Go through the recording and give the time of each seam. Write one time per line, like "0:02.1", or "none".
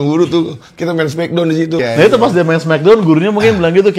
0:01.8